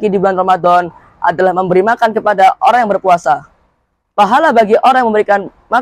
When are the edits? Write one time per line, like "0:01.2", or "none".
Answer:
none